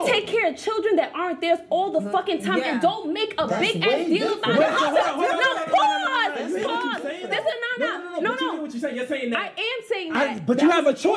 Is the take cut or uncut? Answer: uncut